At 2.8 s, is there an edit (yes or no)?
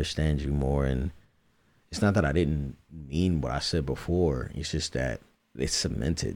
no